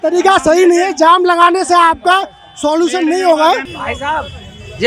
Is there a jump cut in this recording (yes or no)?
yes